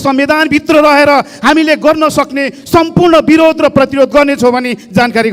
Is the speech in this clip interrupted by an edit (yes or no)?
no